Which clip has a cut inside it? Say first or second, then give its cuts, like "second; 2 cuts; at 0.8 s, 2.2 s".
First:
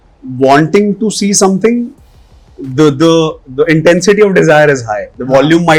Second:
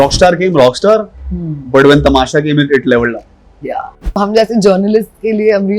second; 1 cut; at 4.2 s